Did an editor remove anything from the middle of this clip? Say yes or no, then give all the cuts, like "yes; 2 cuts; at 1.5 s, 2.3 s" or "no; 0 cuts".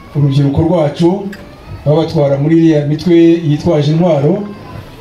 no; 0 cuts